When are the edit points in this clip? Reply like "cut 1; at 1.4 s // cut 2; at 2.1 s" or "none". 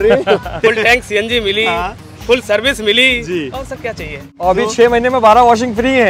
cut 1; at 4.3 s